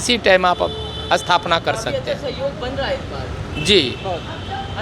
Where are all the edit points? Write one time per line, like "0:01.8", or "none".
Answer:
none